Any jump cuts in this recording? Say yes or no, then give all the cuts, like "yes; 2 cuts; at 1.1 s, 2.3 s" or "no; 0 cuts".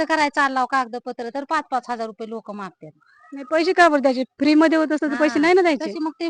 no; 0 cuts